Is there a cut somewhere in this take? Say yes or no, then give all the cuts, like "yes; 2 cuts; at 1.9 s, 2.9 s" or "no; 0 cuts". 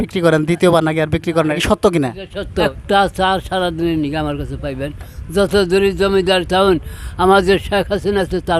yes; 2 cuts; at 1.5 s, 2.8 s